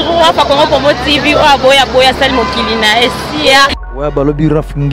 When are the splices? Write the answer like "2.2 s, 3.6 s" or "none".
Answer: 3.8 s